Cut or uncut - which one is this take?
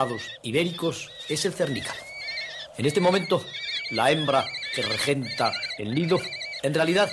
cut